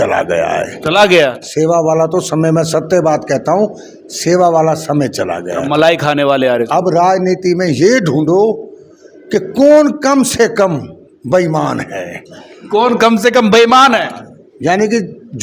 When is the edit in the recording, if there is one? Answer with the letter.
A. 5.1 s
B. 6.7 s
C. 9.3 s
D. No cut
D